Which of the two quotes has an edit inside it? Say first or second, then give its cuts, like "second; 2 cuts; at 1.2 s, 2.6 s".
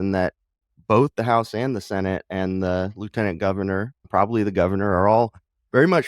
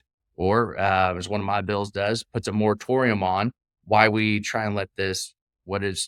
first; 1 cut; at 4.0 s